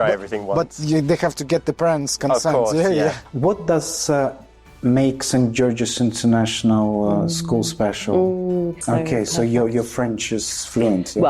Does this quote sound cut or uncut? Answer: cut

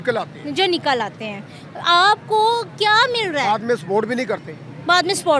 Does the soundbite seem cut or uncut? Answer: uncut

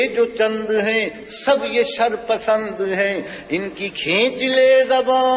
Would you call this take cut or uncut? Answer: uncut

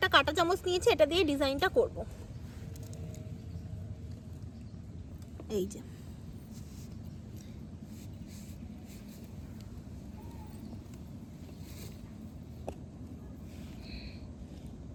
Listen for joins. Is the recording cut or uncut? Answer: uncut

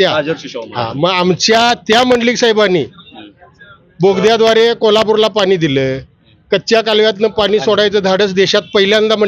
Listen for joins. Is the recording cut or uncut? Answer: uncut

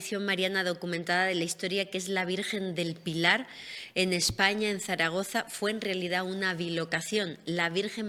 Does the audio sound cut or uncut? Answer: uncut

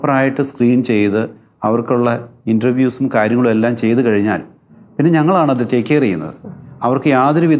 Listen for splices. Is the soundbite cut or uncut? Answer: uncut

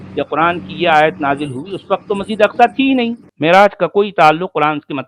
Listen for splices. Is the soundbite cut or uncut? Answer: cut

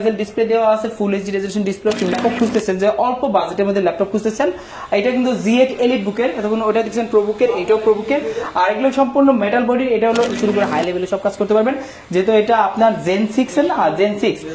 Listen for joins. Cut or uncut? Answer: cut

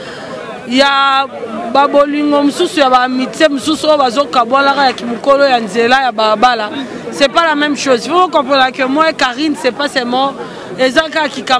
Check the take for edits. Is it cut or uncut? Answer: uncut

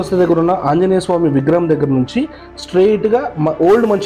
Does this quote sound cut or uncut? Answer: uncut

